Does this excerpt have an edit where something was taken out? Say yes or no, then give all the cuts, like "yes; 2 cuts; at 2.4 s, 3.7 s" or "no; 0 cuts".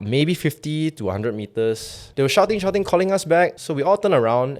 yes; 2 cuts; at 2.0 s, 3.6 s